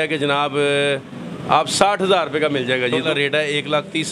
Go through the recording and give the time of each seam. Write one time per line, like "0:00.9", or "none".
0:03.0